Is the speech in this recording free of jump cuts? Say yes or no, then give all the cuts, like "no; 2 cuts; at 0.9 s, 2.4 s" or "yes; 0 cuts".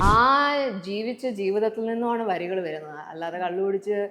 yes; 0 cuts